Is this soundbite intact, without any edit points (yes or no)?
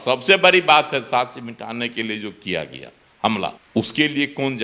no